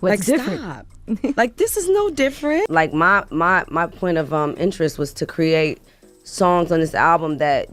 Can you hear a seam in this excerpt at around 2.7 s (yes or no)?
yes